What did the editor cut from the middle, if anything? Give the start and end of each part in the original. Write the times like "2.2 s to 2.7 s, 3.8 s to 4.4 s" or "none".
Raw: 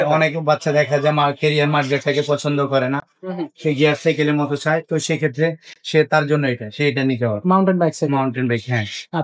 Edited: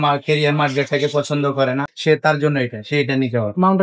3.1 s to 5.8 s